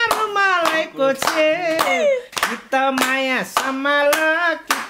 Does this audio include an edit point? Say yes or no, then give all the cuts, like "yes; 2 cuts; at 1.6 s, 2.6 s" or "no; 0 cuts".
no; 0 cuts